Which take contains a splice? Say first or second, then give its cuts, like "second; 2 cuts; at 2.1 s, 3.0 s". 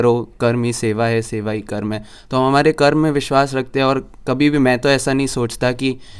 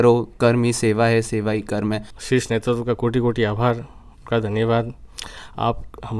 second; 1 cut; at 2.1 s